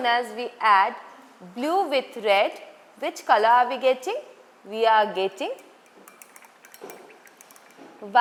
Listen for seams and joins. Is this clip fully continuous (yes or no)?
yes